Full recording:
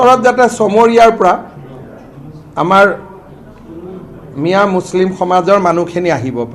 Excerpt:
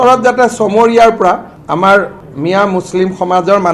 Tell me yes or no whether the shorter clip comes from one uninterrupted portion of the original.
no